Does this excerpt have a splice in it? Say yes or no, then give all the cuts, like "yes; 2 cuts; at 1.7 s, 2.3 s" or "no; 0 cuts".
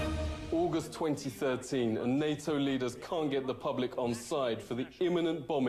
yes; 1 cut; at 1.8 s